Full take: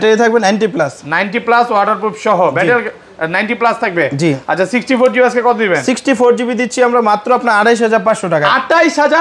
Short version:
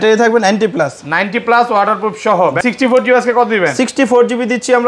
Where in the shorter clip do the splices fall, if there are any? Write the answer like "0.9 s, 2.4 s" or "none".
2.6 s